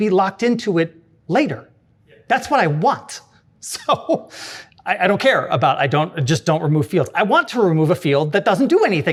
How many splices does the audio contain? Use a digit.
0